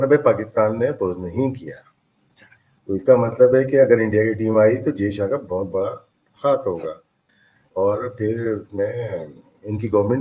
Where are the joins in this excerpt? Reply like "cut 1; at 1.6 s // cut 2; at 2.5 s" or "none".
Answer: none